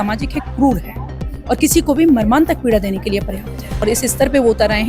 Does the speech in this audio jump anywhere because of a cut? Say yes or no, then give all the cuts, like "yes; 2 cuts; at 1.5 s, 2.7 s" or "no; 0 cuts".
yes; 1 cut; at 3.7 s